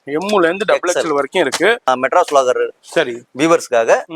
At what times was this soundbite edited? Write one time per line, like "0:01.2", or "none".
0:01.9